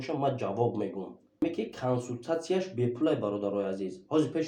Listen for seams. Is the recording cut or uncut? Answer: cut